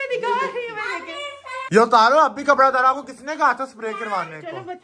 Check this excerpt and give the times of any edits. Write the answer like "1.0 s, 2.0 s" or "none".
1.6 s

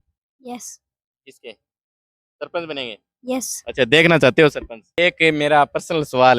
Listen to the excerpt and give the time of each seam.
4.8 s

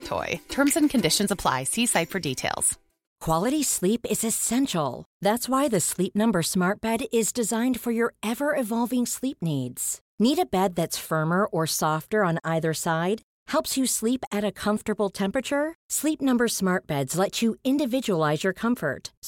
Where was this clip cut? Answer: 3.0 s

